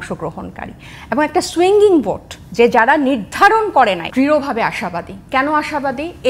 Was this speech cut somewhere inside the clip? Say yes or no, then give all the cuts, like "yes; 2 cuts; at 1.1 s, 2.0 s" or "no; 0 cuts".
yes; 1 cut; at 4.1 s